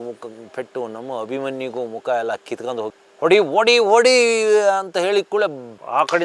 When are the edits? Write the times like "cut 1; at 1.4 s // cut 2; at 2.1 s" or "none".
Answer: cut 1; at 2.9 s